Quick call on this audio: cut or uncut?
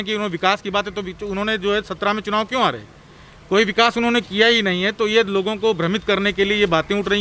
uncut